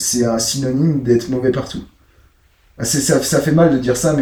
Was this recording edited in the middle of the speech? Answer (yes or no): no